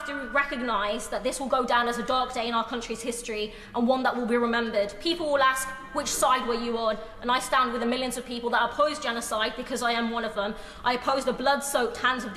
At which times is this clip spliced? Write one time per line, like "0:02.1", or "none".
none